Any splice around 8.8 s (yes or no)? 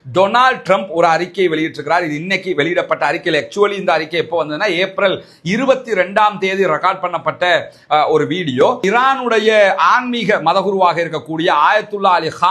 yes